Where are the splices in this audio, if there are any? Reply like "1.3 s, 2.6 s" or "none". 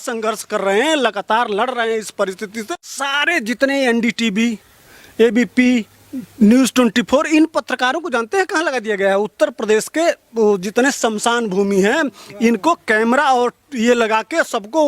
2.5 s